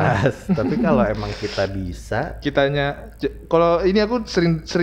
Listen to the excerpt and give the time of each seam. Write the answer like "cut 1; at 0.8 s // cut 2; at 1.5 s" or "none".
none